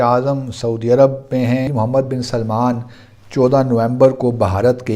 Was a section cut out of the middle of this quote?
yes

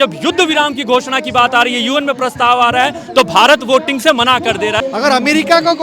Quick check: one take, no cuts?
no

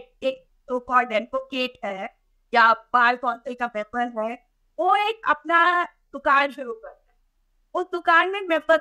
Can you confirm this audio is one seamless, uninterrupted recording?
yes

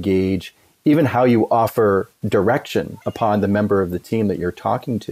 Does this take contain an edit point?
yes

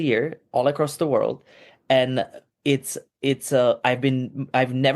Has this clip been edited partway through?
no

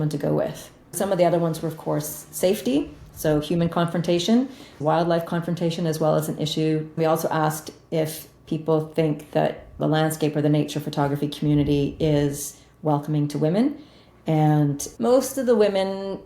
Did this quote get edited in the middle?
yes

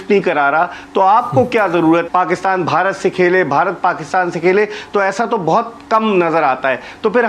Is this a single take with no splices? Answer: no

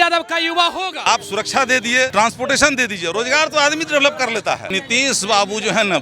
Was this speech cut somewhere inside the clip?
yes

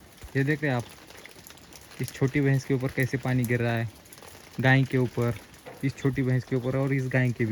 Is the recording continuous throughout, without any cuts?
yes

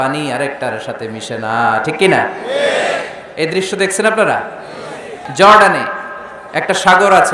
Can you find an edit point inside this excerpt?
yes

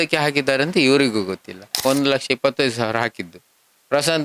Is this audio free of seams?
no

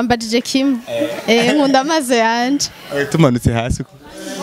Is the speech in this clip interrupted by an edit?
no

